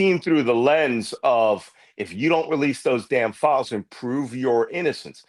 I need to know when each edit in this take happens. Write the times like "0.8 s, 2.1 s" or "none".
none